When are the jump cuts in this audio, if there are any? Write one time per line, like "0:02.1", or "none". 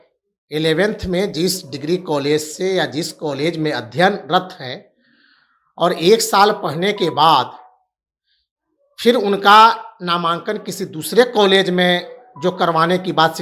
none